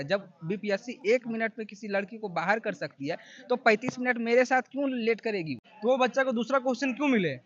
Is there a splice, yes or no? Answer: yes